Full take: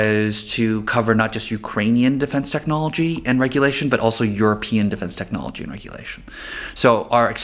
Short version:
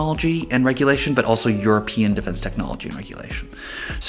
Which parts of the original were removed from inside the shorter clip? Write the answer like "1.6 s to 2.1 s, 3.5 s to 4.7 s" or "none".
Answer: none